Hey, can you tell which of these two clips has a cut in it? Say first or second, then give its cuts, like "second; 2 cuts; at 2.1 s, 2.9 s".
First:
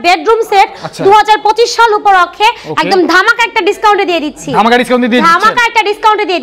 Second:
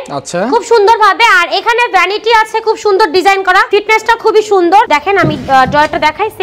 second; 2 cuts; at 3.7 s, 4.9 s